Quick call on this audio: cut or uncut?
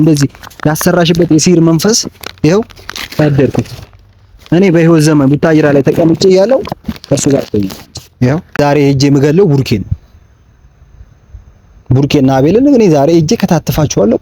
cut